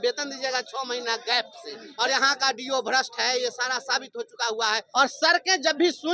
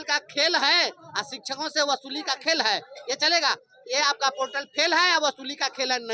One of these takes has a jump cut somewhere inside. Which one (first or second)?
first